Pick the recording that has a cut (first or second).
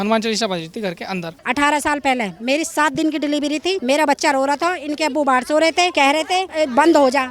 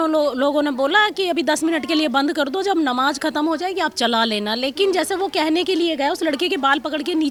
first